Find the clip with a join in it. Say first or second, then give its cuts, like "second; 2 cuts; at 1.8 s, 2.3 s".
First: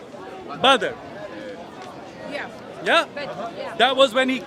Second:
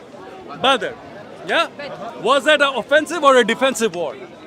second; 2 cuts; at 1.2 s, 2.1 s